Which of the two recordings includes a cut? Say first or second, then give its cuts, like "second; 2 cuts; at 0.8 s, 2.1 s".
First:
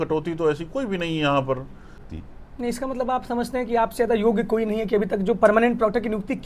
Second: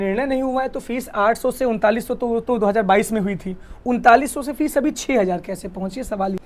first; 1 cut; at 2.0 s